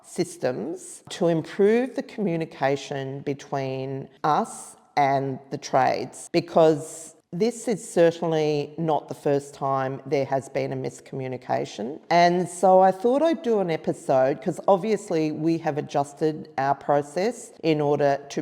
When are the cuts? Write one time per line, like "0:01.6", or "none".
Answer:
0:01.1
0:04.1
0:06.1
0:12.0
0:17.5